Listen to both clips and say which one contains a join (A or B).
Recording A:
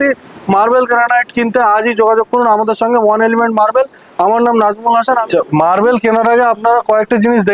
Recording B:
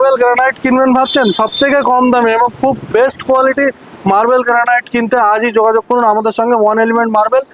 A